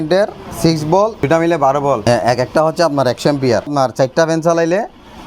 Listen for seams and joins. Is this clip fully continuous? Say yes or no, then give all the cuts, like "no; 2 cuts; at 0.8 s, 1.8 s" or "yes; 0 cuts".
no; 3 cuts; at 1.3 s, 2.0 s, 3.7 s